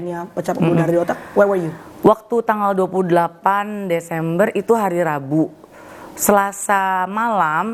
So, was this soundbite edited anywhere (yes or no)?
no